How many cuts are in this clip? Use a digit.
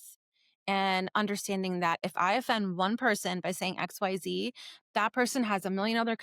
1